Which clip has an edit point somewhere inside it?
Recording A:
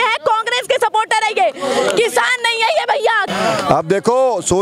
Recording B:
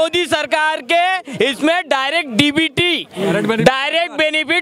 A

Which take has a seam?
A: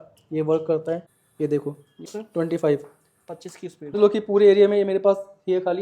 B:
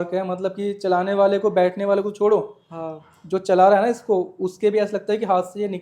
A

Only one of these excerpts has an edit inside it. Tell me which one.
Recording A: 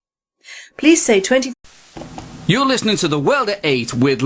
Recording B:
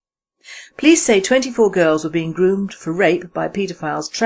B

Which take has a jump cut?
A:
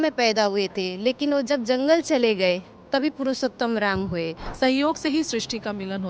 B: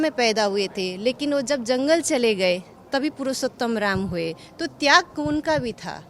A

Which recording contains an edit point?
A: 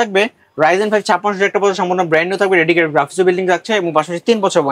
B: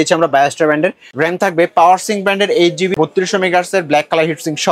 B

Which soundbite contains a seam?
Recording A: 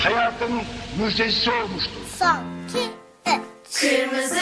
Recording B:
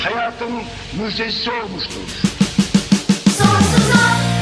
A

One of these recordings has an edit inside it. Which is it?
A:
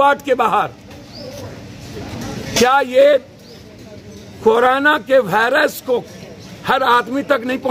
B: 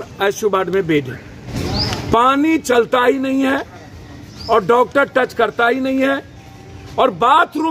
B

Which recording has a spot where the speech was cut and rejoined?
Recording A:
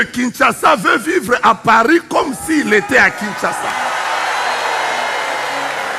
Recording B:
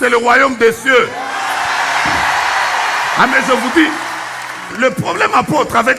B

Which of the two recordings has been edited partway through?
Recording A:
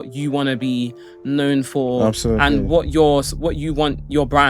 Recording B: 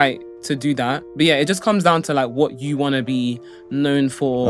B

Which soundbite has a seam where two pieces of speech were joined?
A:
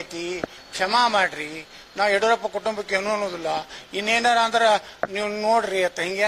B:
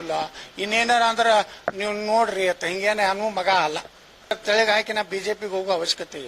B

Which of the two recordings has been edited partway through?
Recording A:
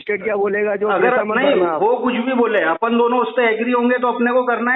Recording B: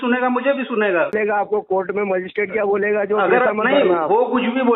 B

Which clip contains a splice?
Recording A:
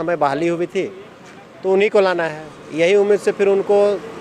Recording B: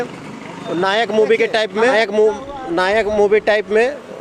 B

